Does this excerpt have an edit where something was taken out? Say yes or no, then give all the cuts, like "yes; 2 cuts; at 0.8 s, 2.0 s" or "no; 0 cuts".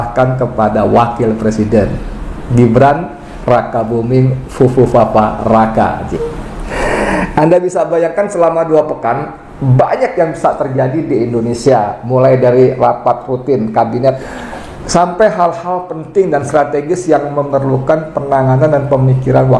yes; 2 cuts; at 6.1 s, 14.3 s